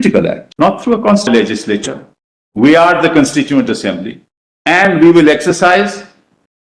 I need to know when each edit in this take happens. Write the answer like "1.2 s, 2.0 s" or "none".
1.3 s

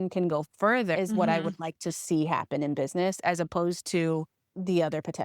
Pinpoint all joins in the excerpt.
1.0 s

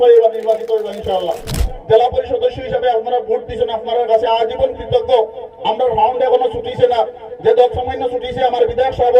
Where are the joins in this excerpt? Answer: 1.7 s

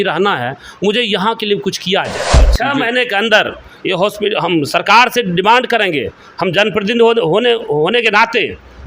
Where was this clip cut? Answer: 2.5 s

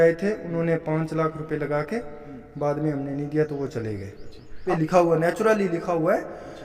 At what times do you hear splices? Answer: 4.6 s

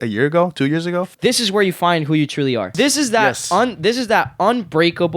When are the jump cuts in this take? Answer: 1.1 s, 2.7 s

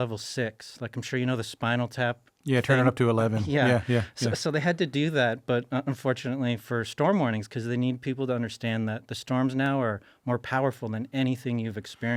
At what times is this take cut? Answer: none

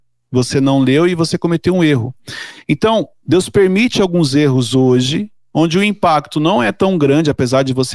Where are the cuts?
none

